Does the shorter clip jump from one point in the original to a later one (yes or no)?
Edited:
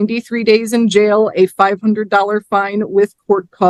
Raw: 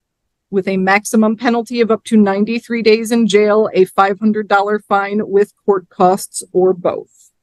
no